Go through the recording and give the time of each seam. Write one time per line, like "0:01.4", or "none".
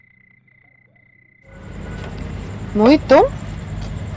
0:01.1

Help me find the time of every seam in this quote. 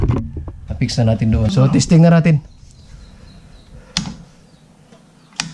0:01.5

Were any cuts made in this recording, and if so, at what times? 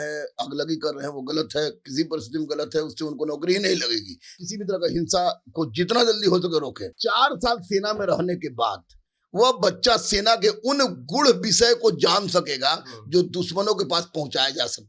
0:04.3
0:06.8

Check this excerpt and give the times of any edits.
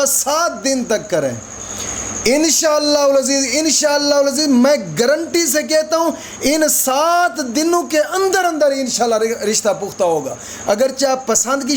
none

